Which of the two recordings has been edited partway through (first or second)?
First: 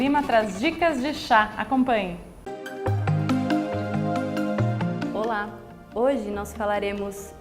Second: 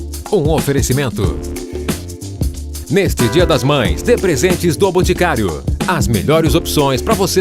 first